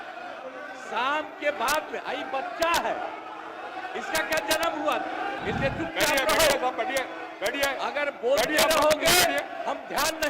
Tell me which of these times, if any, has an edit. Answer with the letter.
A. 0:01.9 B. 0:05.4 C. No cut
B